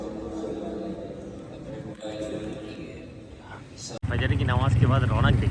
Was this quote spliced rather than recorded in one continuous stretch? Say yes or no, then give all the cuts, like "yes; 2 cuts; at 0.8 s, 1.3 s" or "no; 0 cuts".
yes; 1 cut; at 4.0 s